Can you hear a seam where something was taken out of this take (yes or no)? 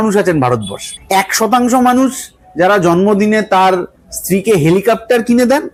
no